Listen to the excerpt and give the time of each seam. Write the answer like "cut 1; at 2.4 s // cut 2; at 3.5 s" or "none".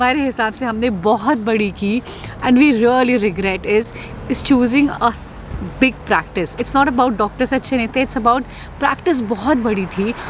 none